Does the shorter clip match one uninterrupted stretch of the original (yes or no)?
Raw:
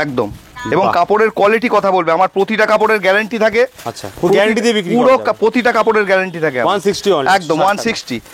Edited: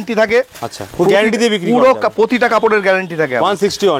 yes